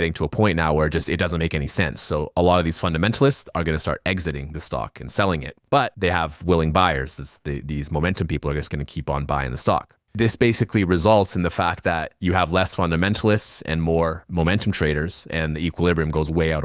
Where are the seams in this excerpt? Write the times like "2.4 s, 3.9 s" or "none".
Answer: 5.8 s, 10.2 s